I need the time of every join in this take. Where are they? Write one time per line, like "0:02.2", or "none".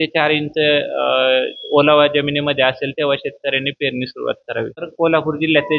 0:04.8